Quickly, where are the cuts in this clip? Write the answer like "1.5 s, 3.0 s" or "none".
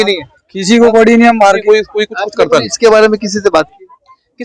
1.6 s